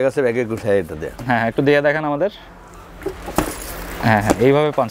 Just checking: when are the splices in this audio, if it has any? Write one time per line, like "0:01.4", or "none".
none